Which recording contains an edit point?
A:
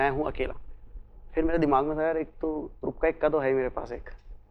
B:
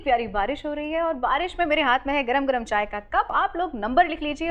B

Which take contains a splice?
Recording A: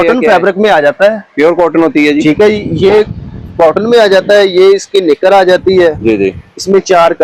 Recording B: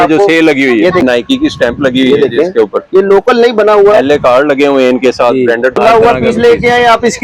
B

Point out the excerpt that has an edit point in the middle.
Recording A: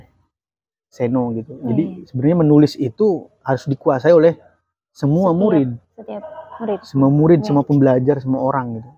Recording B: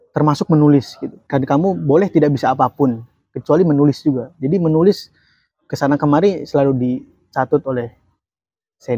B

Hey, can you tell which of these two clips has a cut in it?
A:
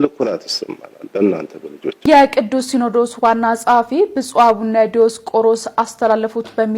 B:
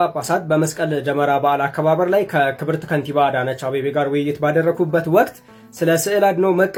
A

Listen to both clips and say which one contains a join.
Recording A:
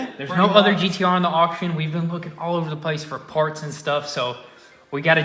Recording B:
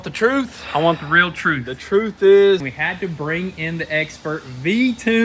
B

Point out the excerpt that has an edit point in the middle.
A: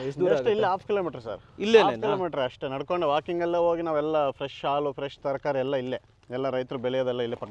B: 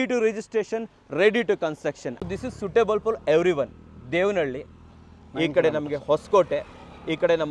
B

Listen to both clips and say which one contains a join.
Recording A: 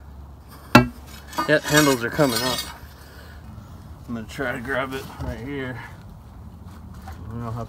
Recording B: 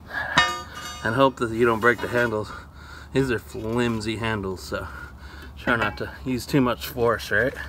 A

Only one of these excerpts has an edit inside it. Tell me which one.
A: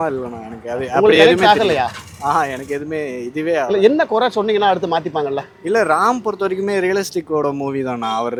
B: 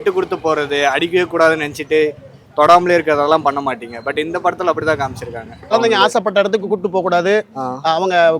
B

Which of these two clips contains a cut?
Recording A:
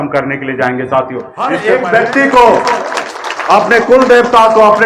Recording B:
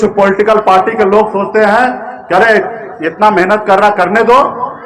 A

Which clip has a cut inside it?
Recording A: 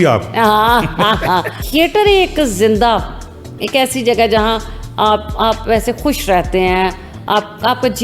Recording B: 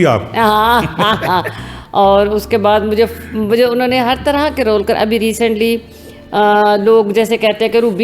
A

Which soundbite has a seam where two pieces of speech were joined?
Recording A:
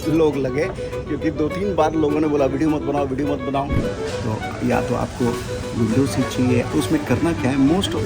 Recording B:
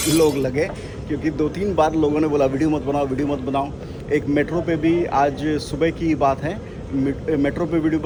A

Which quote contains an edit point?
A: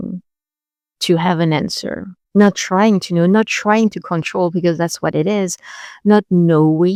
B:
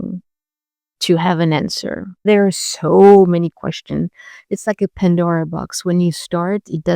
B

